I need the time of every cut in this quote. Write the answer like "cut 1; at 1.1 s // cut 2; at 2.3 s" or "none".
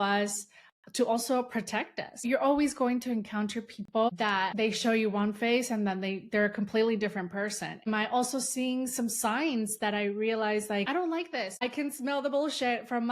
cut 1; at 2.1 s // cut 2; at 4.1 s // cut 3; at 7.9 s // cut 4; at 11.0 s